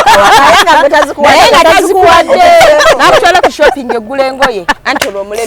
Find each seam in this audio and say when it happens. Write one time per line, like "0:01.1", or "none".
0:02.8